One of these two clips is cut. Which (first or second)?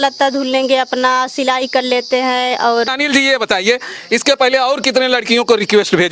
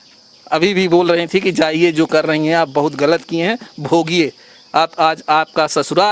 first